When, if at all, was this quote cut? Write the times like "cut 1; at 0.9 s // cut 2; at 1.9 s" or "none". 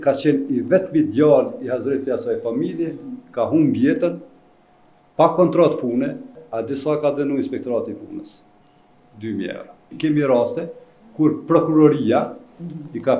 cut 1; at 6.4 s // cut 2; at 9.9 s